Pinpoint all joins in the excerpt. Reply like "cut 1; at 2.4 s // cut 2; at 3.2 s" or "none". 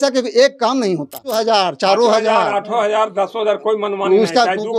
cut 1; at 1.3 s